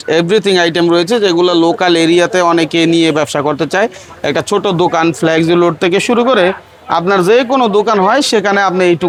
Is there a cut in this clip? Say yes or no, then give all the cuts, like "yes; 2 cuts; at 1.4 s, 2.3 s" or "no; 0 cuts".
no; 0 cuts